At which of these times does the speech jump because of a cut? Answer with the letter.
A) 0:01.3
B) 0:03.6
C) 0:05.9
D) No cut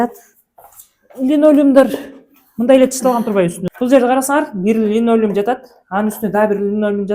B